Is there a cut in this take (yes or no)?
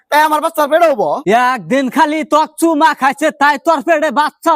yes